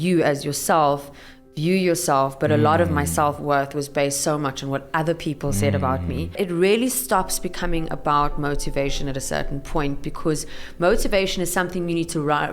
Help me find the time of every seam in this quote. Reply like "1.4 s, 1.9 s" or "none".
6.4 s

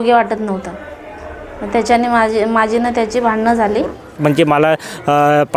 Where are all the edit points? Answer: 4.0 s

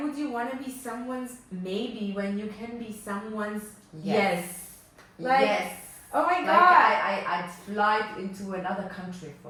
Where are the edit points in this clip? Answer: none

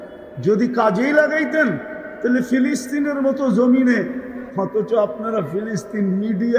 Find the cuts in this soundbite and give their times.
4.4 s

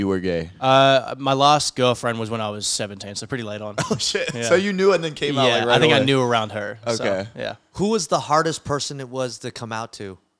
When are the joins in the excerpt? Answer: none

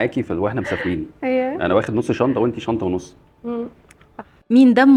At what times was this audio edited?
none

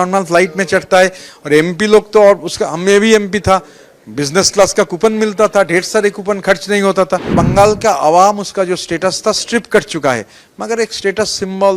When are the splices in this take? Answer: 7.3 s

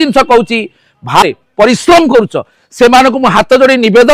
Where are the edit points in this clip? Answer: 1.2 s

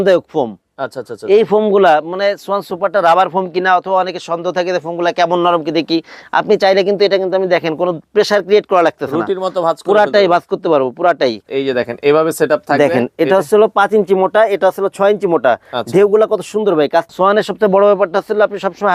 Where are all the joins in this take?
11.4 s, 17.1 s

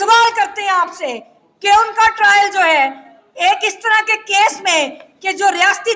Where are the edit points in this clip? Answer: none

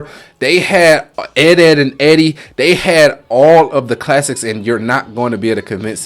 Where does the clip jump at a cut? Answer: none

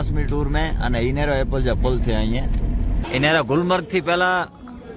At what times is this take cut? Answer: 3.0 s

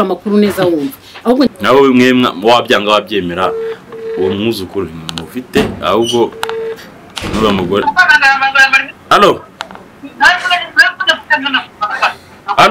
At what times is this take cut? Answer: 1.5 s

